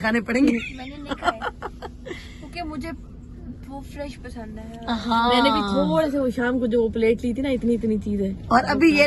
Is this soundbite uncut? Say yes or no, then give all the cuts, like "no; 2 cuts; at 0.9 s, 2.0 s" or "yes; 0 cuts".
yes; 0 cuts